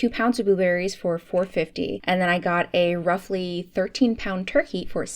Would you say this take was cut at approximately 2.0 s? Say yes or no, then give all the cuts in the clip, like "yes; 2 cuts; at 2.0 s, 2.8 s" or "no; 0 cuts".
yes; 1 cut; at 2.0 s